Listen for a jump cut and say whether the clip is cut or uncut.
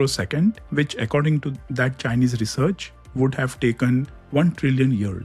uncut